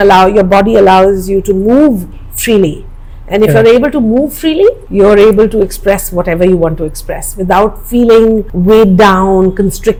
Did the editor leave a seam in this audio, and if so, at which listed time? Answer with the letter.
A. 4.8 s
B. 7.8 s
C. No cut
C